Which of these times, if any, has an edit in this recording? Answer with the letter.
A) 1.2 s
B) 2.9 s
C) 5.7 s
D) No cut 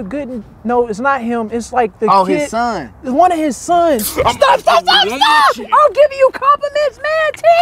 C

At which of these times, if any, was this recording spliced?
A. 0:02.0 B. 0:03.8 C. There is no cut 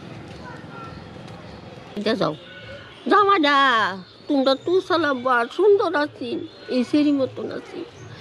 A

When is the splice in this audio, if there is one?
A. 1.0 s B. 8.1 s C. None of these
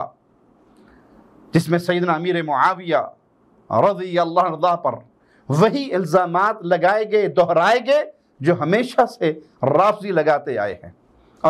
C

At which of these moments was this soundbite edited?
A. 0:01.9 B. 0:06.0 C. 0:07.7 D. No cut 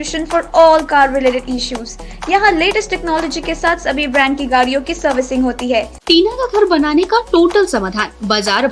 B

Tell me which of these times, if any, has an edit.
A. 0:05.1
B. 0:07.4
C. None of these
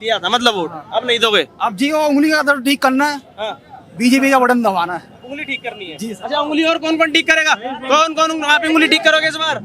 C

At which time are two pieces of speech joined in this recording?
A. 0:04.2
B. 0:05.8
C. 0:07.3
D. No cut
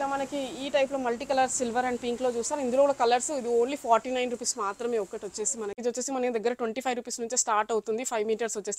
B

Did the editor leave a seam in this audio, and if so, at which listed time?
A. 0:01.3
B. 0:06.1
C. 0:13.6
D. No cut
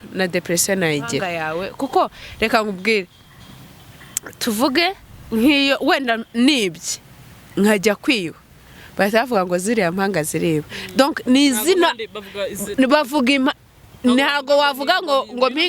A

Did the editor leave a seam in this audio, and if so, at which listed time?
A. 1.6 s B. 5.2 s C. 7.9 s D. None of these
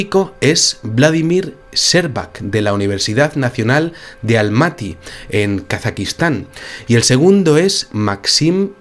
B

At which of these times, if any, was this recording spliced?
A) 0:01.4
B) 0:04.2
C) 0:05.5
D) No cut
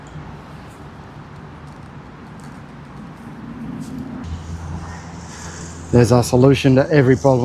B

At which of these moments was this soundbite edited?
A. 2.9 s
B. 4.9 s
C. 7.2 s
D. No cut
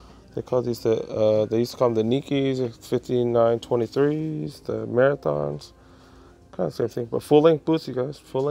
D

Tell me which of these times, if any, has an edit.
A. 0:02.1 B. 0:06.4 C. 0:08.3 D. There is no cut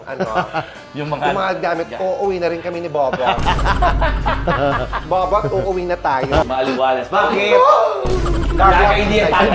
B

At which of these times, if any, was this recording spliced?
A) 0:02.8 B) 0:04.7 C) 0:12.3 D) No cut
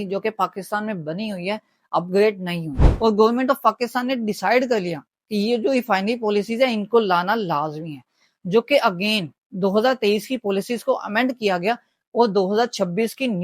A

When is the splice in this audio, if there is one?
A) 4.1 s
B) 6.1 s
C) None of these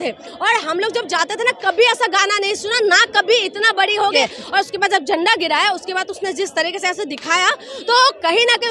A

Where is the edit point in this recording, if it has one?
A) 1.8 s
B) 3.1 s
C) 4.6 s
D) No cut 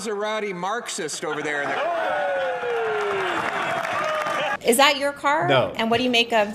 C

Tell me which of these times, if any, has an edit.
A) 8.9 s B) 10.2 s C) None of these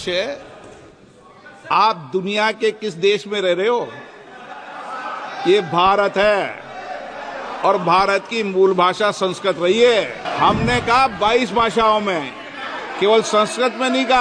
B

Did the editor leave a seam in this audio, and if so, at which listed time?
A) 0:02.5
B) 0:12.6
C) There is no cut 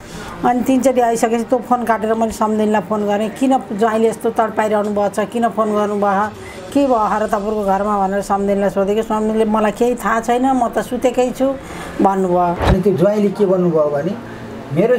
B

